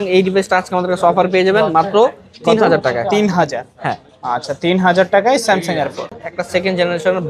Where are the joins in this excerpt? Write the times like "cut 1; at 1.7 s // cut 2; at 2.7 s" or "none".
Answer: cut 1; at 6.2 s